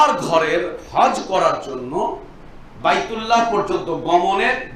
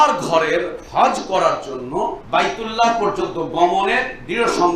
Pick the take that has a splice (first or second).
second